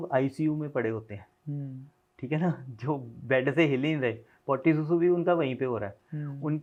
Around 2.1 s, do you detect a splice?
no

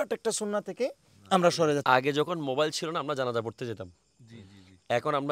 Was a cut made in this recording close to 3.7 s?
no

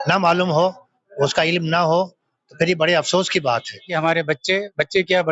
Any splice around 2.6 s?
no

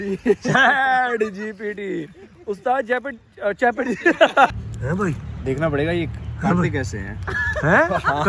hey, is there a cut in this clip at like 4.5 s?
yes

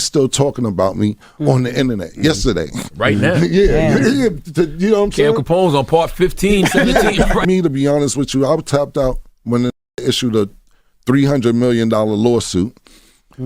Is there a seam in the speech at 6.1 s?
no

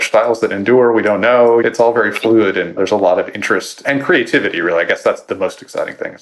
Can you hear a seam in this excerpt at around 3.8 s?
yes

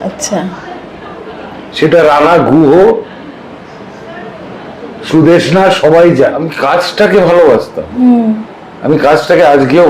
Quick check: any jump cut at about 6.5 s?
yes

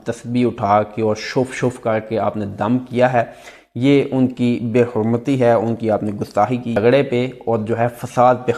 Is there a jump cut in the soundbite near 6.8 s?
yes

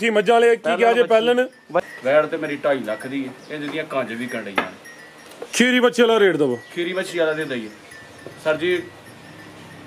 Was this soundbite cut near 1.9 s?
yes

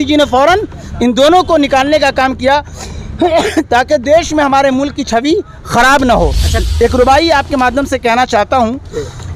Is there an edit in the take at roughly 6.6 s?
yes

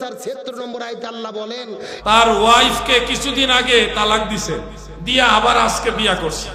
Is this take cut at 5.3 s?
no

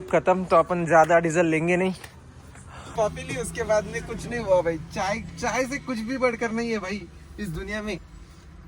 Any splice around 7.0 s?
no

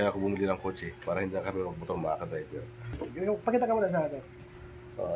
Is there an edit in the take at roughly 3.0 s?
yes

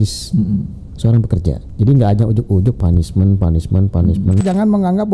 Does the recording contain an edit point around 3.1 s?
no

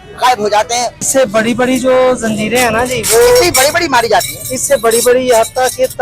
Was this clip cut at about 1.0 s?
yes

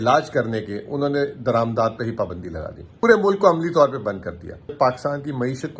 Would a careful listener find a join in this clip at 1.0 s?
no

